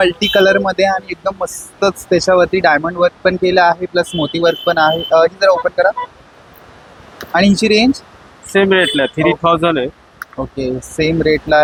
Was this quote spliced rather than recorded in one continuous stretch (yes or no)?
no